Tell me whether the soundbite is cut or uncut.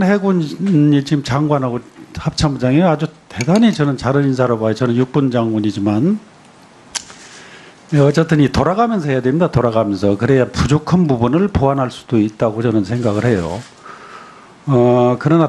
cut